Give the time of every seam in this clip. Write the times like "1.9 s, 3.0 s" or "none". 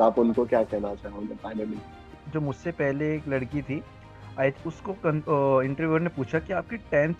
2.1 s, 4.5 s